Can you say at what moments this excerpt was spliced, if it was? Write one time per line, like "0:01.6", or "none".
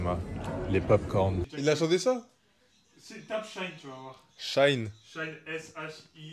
0:01.5